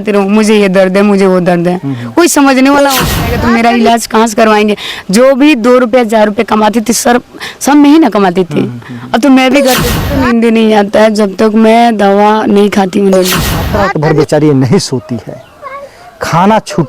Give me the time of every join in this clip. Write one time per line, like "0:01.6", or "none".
0:03.2
0:10.1
0:13.7